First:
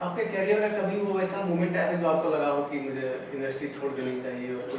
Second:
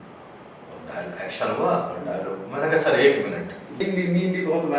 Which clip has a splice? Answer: second; 1 cut; at 3.8 s

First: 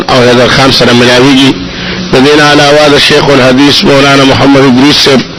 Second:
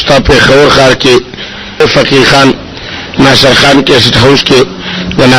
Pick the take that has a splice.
second; 1 cut; at 1.8 s

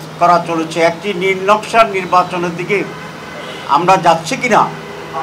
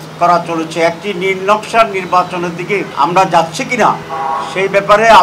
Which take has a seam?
second; 2 cuts; at 2.9 s, 4.1 s

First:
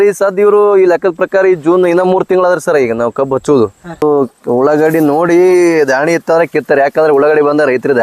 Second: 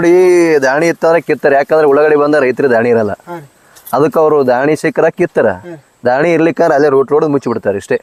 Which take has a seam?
first; 1 cut; at 4.0 s

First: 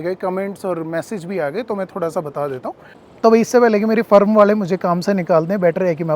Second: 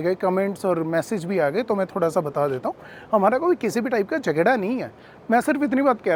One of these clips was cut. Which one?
first; 1 cut; at 2.9 s

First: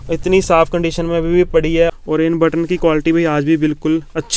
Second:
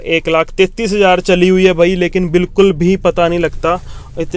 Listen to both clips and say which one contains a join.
first; 1 cut; at 1.9 s

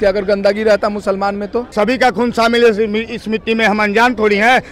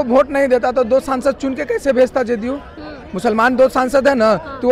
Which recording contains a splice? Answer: first; 1 cut; at 1.7 s

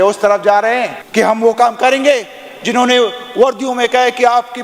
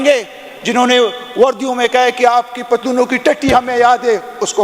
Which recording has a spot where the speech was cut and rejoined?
first; 1 cut; at 1.0 s

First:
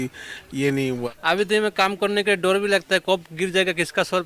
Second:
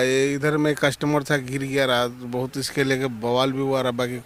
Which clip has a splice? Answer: first; 1 cut; at 1.1 s

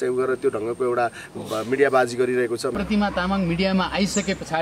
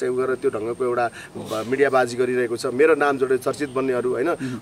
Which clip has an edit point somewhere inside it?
first; 1 cut; at 2.7 s

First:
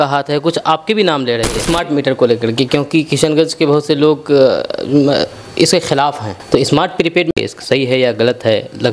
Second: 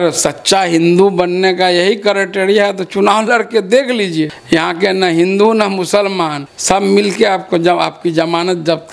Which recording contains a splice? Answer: first; 2 cuts; at 1.6 s, 6.3 s

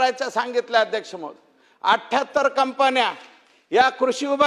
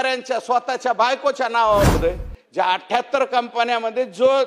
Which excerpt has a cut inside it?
second; 1 cut; at 2.0 s

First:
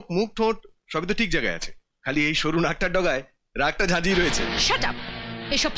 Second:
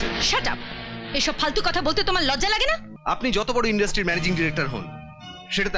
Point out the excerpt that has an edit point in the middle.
second; 1 cut; at 2.9 s

